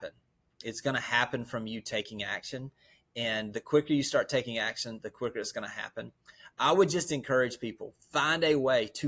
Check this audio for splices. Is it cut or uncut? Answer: uncut